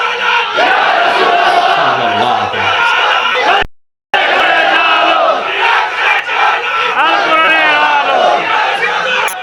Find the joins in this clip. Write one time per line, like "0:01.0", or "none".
none